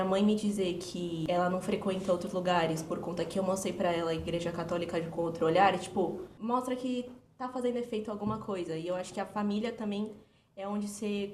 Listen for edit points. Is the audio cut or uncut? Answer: cut